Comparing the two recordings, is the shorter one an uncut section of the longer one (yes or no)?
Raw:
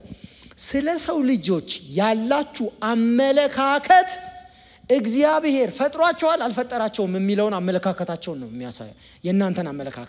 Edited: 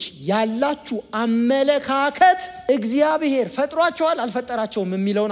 no